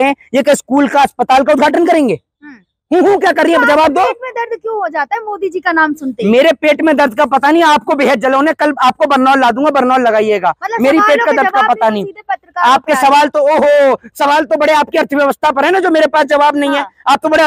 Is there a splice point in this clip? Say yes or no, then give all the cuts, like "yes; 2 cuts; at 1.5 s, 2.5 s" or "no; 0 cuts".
no; 0 cuts